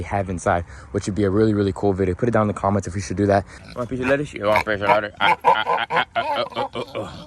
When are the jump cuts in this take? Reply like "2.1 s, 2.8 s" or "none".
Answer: 3.6 s